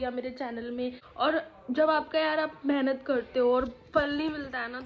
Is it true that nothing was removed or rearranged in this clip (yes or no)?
no